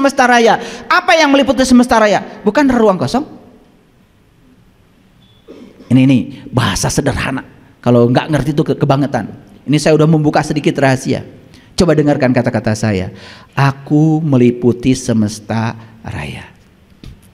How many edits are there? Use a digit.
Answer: 0